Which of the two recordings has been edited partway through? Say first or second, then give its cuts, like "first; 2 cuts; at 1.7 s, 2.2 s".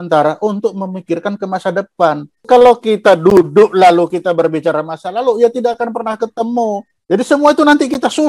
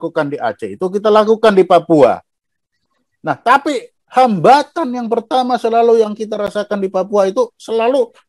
first; 2 cuts; at 2.4 s, 6.9 s